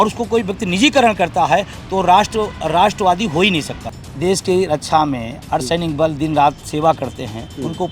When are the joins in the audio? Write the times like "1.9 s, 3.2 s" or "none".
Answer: 3.9 s